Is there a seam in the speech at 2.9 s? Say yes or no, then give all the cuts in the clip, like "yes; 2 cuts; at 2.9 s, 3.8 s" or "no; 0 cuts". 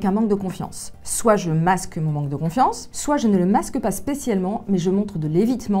yes; 1 cut; at 2.9 s